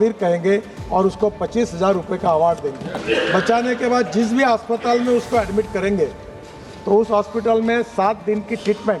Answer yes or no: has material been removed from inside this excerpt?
yes